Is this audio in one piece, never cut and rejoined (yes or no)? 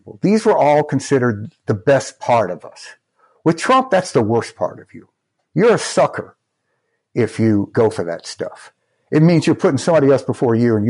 yes